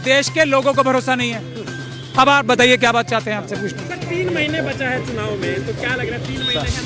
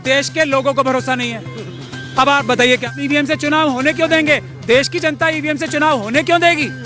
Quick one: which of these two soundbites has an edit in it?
second; 1 cut; at 2.9 s

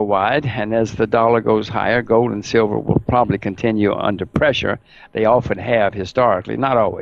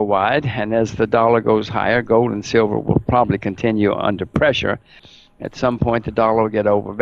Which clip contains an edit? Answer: second; 1 cut; at 5.0 s

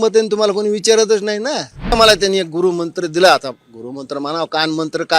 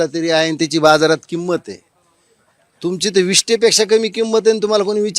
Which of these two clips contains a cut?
first; 1 cut; at 1.9 s

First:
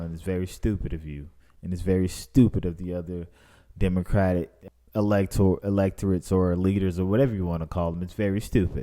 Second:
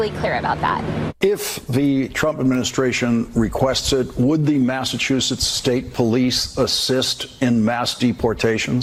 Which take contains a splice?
first; 1 cut; at 4.6 s

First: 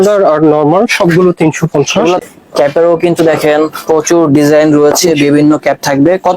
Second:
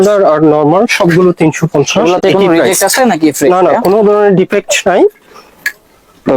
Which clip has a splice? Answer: first; 1 cut; at 2.2 s

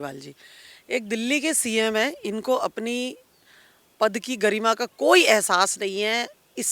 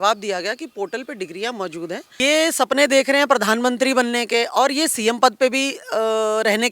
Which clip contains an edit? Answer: second; 1 cut; at 2.1 s

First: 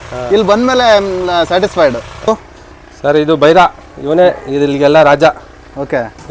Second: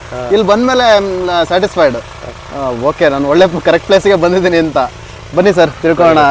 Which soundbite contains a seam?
first; 1 cut; at 2.2 s

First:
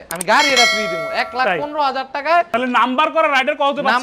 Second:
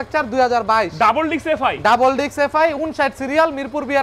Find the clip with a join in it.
first; 1 cut; at 2.5 s

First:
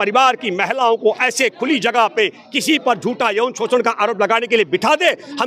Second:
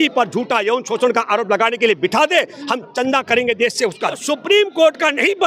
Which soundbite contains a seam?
second; 1 cut; at 4.2 s

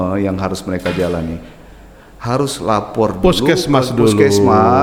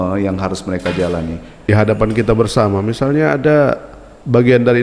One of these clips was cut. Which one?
second; 1 cut; at 1.7 s

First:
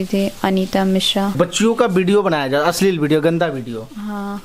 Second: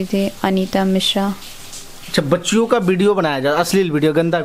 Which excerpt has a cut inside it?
first; 1 cut; at 1.3 s

